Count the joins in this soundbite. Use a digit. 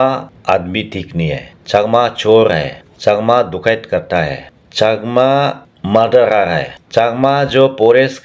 1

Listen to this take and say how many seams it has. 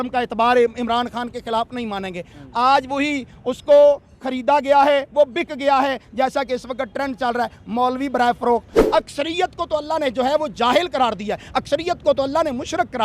1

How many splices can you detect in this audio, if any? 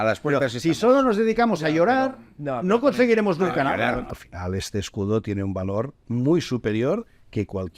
1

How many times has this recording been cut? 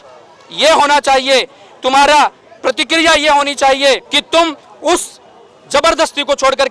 1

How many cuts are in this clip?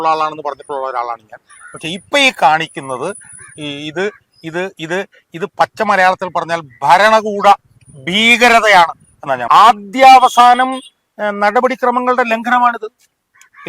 1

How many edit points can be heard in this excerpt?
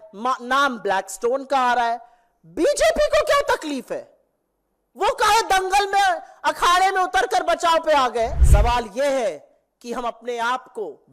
1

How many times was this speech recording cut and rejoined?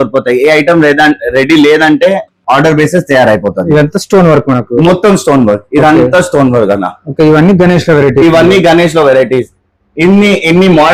0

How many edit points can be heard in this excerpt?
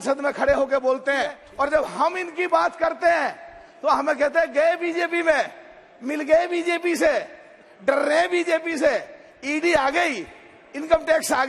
1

